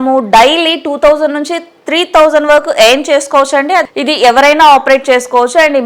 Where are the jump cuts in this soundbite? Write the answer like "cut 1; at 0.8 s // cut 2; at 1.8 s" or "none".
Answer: cut 1; at 3.9 s